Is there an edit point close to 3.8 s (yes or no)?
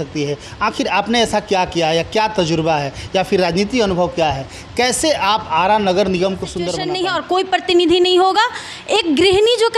no